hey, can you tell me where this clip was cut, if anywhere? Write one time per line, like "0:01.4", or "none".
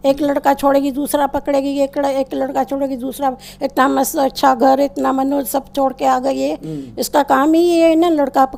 none